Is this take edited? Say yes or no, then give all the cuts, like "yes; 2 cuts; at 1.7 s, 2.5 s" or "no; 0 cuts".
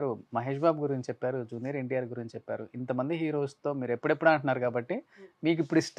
no; 0 cuts